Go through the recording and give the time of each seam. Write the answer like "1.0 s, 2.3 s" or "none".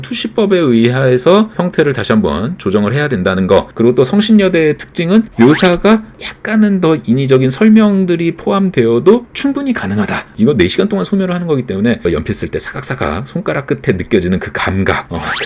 none